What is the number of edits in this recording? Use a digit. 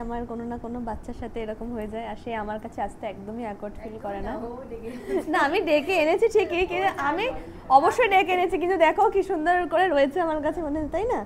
0